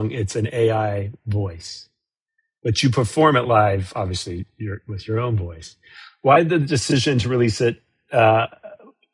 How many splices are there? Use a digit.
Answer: 0